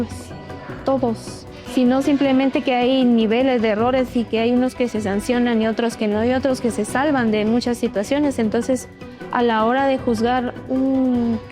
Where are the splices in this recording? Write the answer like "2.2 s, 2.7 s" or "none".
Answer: 1.6 s

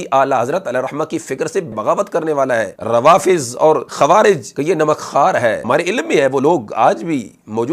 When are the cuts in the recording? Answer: 1.7 s, 2.8 s, 3.9 s, 4.5 s, 5.6 s

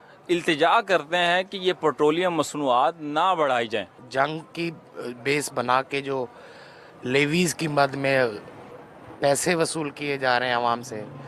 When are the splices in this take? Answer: none

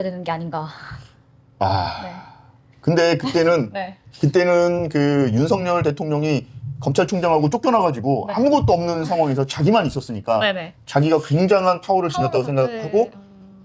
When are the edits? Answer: none

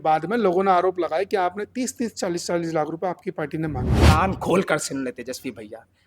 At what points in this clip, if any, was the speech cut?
3.9 s

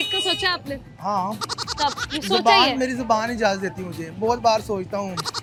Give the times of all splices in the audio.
none

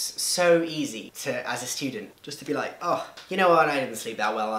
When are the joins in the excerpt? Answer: 1.1 s

